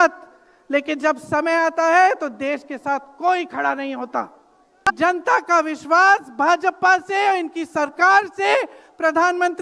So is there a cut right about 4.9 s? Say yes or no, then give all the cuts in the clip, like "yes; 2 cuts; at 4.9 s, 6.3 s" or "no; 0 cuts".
yes; 1 cut; at 4.9 s